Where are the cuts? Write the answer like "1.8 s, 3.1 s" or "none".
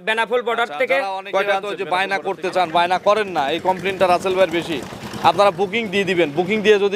1.7 s